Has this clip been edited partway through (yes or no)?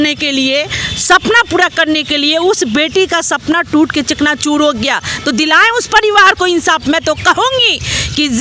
no